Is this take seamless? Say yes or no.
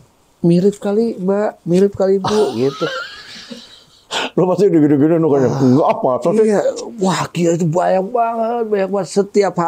yes